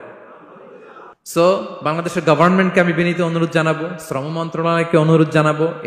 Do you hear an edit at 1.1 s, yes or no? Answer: yes